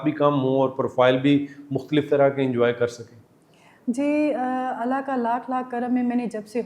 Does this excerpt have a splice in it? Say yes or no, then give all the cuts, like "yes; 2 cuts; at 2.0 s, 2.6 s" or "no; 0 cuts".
no; 0 cuts